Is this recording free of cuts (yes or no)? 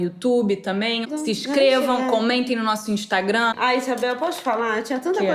no